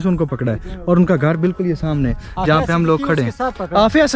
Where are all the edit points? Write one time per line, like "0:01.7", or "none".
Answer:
none